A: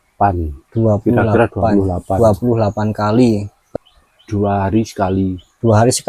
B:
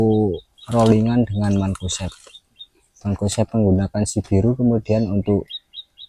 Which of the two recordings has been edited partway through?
A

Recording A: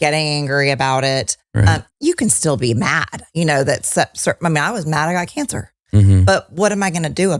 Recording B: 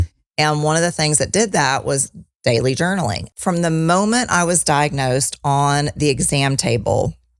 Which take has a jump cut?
B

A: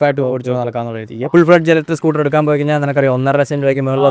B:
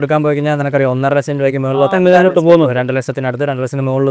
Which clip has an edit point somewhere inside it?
A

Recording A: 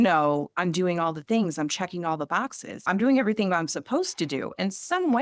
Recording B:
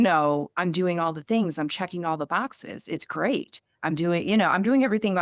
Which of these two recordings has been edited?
A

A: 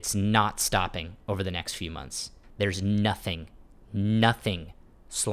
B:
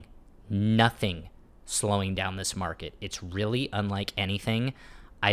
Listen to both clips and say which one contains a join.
A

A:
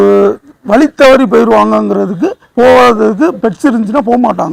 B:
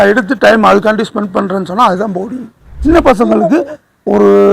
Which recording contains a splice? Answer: B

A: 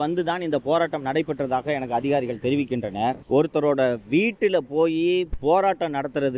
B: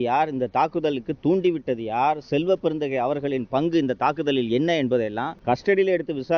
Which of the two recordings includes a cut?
B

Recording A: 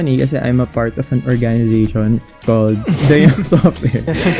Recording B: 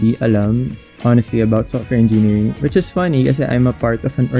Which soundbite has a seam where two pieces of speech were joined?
A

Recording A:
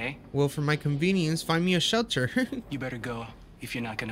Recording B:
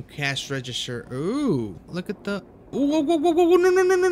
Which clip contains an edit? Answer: B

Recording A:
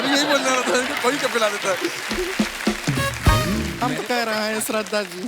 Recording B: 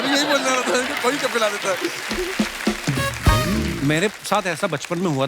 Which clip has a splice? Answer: A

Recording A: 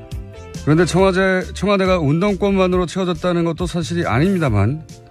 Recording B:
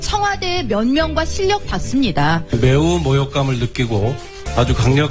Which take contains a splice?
A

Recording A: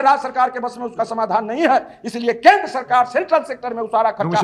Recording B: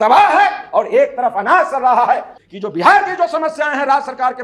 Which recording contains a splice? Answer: B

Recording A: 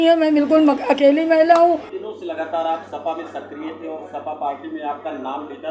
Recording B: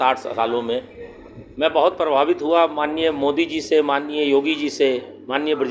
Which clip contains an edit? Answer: A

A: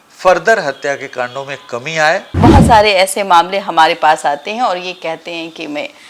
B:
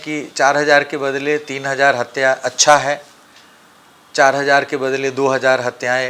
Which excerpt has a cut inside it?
A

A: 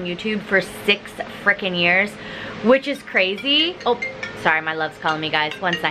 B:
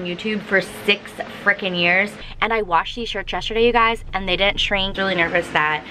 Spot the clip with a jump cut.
B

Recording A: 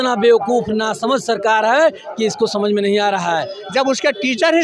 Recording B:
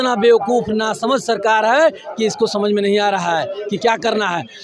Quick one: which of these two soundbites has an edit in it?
A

